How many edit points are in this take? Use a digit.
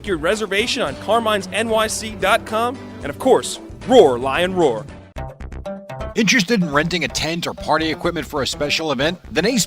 1